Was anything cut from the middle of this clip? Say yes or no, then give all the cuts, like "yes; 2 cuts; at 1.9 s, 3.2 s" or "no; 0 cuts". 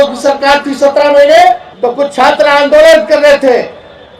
yes; 1 cut; at 1.7 s